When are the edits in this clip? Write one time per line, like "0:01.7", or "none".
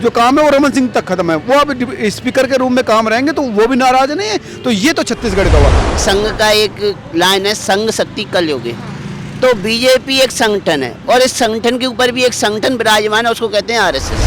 0:05.9

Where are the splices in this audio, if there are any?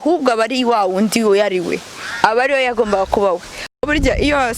0:03.5

